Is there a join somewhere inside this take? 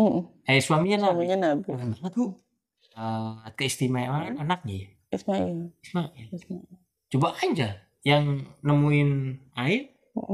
yes; 1 cut; at 3.0 s

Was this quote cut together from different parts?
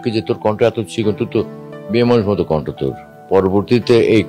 yes; 1 cut; at 3.1 s

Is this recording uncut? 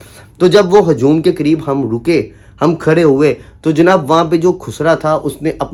yes; 0 cuts

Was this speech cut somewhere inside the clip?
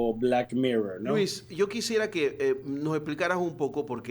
no; 0 cuts

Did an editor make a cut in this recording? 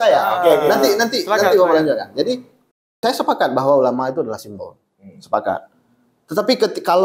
yes; 1 cut; at 3.0 s

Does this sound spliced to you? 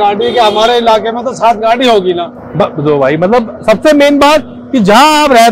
no; 0 cuts

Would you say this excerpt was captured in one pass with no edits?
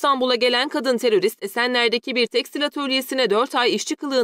yes; 0 cuts

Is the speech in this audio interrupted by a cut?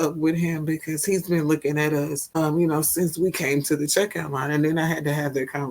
yes; 1 cut; at 2.2 s

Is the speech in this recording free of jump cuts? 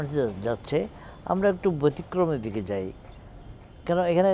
yes; 0 cuts

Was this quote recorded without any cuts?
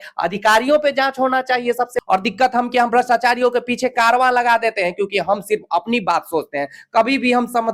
no; 1 cut; at 2.0 s

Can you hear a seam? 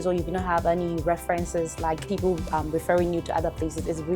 yes; 1 cut; at 2.0 s

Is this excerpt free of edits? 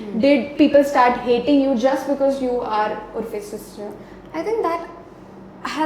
yes; 0 cuts

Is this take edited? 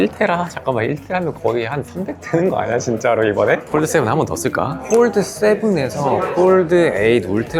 yes; 1 cut; at 4.8 s

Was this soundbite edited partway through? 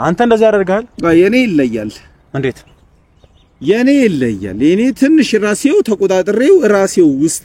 no; 0 cuts

